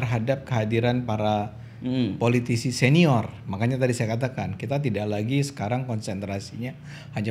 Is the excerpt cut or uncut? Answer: uncut